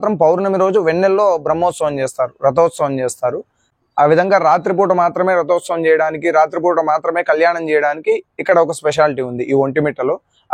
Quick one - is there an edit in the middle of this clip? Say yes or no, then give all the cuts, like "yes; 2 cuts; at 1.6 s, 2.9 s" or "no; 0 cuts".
no; 0 cuts